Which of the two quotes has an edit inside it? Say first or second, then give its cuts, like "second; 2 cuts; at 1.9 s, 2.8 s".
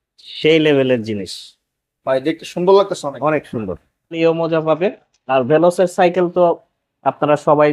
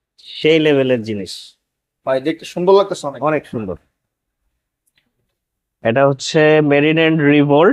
first; 1 cut; at 4.1 s